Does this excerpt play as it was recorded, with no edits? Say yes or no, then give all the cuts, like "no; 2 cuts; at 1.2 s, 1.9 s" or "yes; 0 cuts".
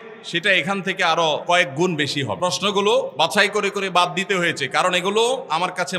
no; 3 cuts; at 1.4 s, 2.4 s, 3.1 s